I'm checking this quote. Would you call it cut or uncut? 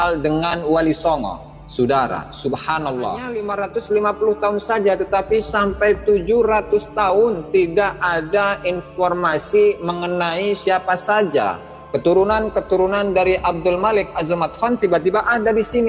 cut